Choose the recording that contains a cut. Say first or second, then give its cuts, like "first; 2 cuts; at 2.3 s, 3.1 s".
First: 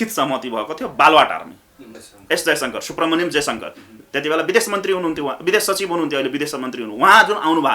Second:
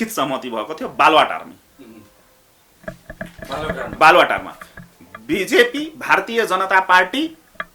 first; 1 cut; at 2.1 s